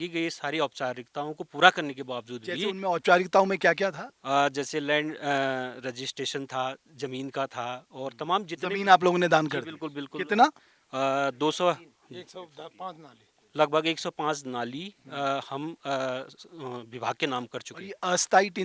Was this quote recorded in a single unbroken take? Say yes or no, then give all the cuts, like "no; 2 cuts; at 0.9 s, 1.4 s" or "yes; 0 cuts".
yes; 0 cuts